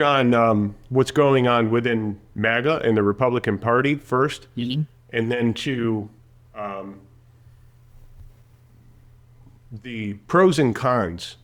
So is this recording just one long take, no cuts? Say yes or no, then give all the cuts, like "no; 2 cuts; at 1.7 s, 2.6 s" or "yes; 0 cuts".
yes; 0 cuts